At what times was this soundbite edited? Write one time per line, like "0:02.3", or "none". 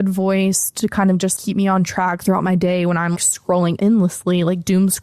0:01.3
0:03.5